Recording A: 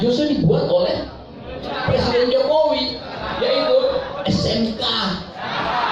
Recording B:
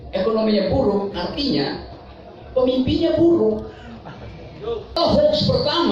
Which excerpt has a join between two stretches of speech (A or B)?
B